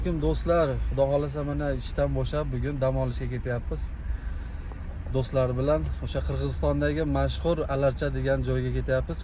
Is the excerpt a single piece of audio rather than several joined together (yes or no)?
yes